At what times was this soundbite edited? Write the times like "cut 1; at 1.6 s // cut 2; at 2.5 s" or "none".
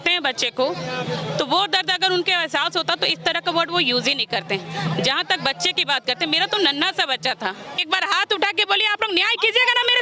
cut 1; at 7.7 s